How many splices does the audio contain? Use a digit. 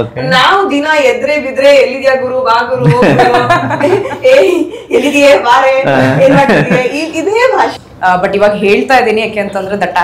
1